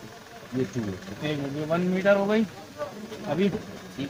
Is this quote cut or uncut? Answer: uncut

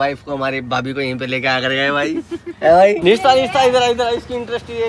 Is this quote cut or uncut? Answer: cut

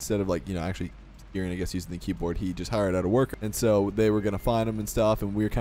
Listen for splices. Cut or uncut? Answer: cut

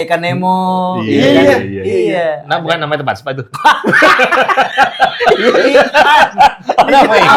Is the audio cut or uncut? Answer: uncut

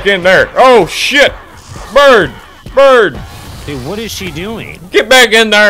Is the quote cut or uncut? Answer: uncut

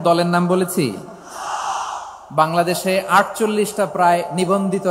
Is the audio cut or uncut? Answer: uncut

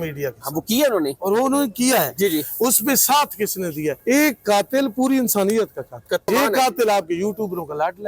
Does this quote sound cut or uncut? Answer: cut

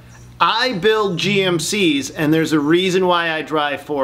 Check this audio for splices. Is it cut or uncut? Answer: uncut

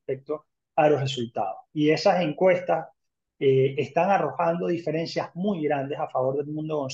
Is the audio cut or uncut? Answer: uncut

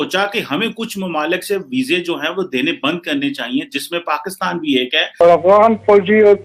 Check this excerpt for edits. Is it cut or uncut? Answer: cut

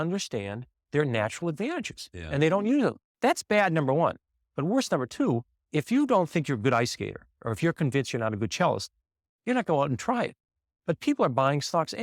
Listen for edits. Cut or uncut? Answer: cut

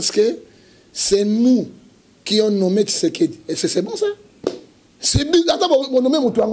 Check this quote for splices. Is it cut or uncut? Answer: uncut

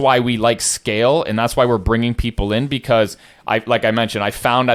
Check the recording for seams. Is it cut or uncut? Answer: uncut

